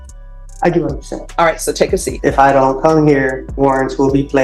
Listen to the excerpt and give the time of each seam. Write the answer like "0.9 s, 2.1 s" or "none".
2.1 s, 3.4 s